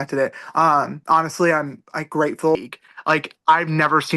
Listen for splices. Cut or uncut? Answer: cut